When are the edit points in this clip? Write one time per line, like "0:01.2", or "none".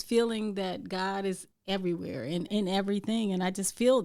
0:01.5
0:02.5